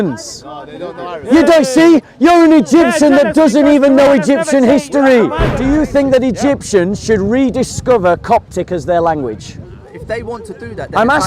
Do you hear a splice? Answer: yes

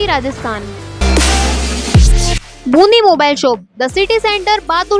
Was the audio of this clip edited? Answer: yes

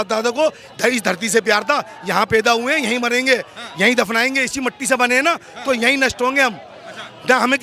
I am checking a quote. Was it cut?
no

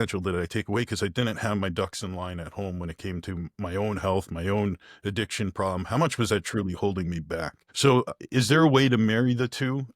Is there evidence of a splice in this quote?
yes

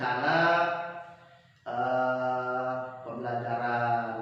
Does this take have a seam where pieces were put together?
no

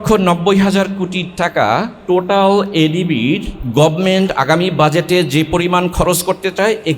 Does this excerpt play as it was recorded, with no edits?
no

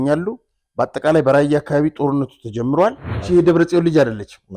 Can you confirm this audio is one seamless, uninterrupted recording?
no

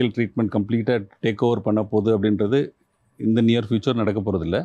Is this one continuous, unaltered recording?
yes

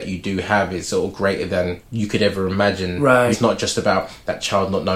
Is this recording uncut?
no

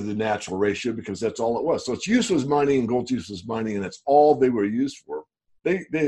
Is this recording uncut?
yes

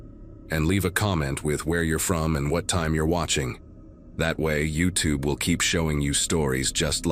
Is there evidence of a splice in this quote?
no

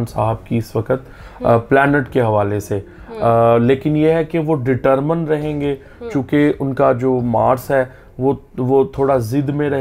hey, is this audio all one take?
yes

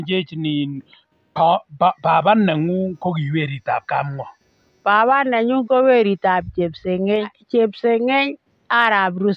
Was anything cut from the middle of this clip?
yes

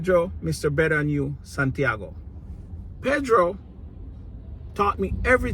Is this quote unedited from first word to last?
no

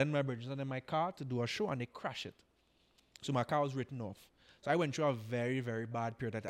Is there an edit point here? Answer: no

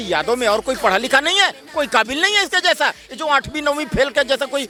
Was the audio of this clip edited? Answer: no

